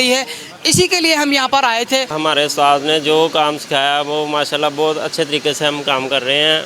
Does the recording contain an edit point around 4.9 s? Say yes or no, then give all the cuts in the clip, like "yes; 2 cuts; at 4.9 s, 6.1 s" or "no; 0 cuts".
no; 1 cut; at 2.1 s